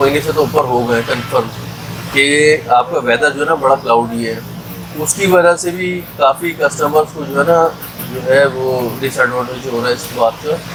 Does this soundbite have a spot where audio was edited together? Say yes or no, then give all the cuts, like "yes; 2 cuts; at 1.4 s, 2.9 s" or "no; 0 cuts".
no; 0 cuts